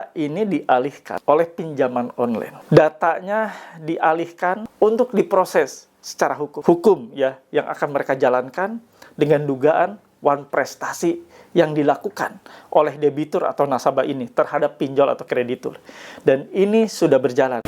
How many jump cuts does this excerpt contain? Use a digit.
4